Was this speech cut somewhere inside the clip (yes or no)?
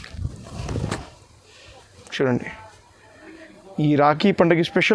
no